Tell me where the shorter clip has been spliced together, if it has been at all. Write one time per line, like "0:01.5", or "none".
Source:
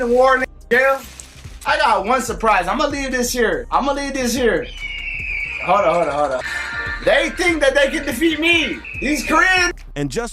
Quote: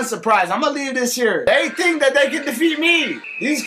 0:01.4